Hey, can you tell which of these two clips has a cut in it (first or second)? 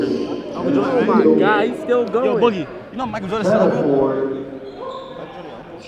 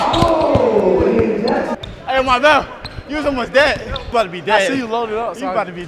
second